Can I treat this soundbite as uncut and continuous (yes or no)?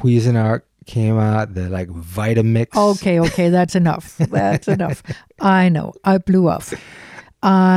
yes